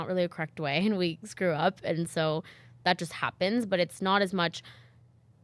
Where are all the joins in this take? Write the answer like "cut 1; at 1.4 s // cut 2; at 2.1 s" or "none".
none